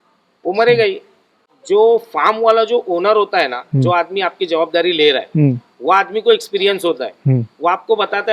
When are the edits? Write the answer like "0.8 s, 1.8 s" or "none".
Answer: 1.5 s